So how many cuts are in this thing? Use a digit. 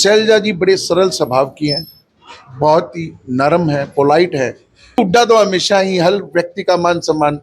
1